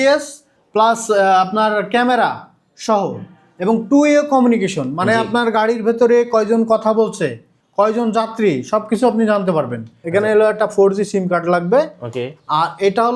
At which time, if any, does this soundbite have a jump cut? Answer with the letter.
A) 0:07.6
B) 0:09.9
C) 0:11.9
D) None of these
B